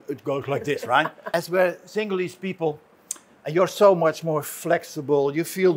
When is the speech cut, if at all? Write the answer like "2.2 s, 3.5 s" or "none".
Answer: 1.2 s